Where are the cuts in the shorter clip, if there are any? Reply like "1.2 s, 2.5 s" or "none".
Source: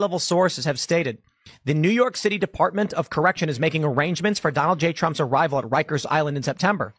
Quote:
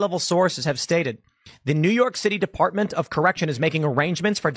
none